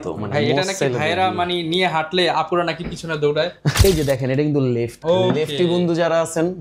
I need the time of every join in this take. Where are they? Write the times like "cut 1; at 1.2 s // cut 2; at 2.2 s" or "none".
cut 1; at 3.7 s // cut 2; at 4.9 s